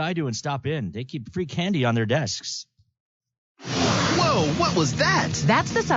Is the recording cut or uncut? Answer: cut